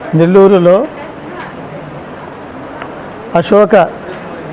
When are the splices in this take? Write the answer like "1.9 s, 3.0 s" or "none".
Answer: 0.9 s